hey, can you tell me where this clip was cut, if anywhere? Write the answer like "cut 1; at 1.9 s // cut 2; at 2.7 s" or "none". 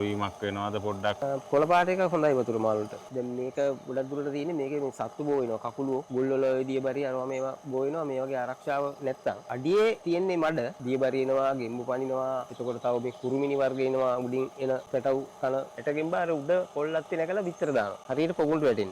cut 1; at 1.2 s // cut 2; at 3.0 s // cut 3; at 6.1 s // cut 4; at 9.5 s // cut 5; at 10.5 s // cut 6; at 12.5 s // cut 7; at 14.8 s // cut 8; at 15.7 s // cut 9; at 18.0 s